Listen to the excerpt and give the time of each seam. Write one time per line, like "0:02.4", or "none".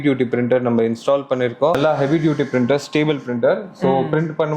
0:01.8